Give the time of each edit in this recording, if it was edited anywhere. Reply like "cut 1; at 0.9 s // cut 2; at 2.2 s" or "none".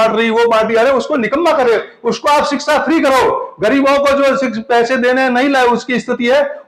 none